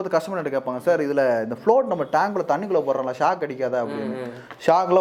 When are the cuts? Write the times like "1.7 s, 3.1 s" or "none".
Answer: none